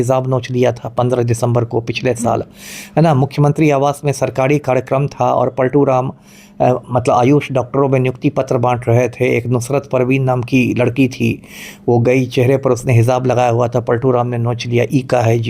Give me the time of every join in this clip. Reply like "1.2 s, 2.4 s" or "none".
none